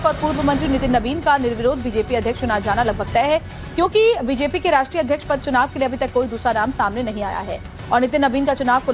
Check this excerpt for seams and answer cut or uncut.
cut